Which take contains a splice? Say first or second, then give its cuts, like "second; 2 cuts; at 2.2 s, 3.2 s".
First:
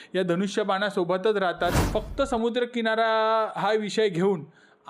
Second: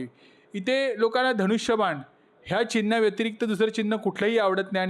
first; 1 cut; at 1.8 s